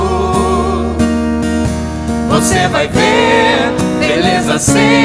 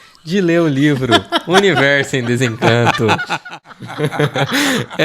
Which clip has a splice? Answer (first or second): second